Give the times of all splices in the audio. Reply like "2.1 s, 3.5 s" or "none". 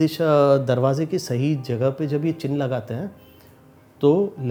none